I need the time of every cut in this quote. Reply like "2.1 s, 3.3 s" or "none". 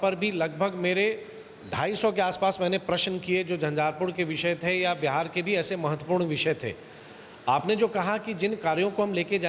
none

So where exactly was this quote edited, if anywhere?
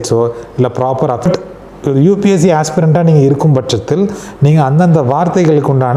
1.3 s

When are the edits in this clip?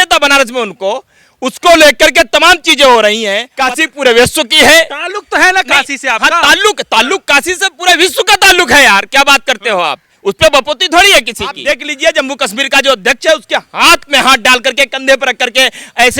3.5 s, 11.6 s

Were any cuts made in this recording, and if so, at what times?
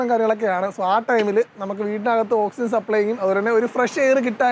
none

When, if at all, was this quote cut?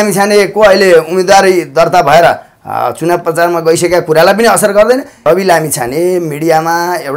5.2 s

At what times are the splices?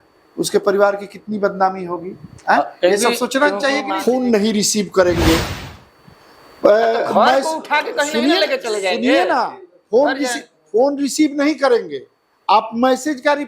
3.9 s

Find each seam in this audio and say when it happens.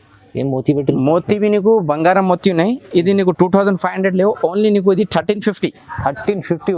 none

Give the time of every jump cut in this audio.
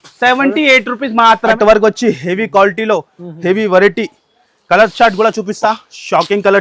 1.5 s

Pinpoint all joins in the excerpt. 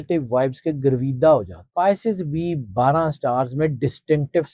1.6 s

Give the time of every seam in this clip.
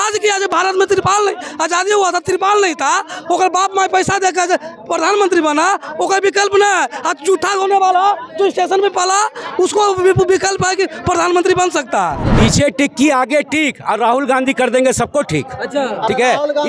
12.3 s

